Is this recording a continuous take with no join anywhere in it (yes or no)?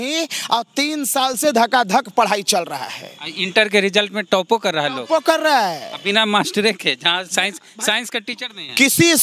yes